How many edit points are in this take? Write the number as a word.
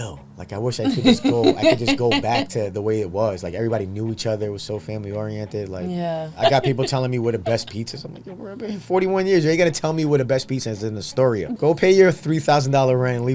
two